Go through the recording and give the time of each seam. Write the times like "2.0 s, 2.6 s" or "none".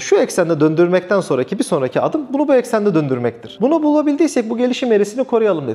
3.5 s